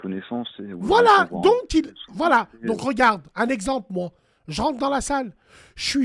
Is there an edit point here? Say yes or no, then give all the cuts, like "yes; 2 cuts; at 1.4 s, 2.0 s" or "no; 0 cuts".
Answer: no; 0 cuts